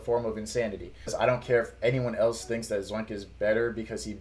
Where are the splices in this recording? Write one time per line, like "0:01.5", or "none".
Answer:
0:01.1

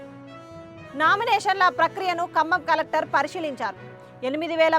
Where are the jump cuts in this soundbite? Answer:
0:00.9

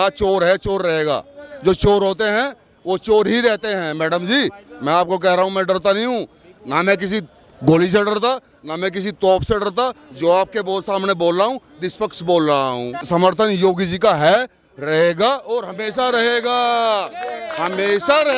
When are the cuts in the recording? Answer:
0:13.0

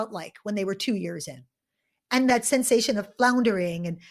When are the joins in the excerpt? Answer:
0:02.3

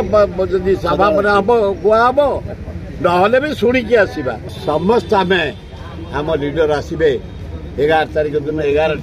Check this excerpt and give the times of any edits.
0:04.6

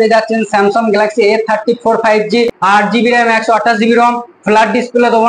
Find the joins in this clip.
0:02.6

